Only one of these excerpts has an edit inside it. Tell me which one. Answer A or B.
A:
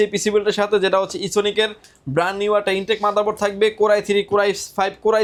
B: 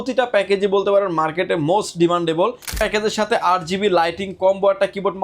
B